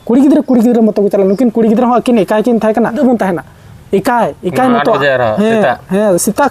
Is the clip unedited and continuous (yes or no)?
no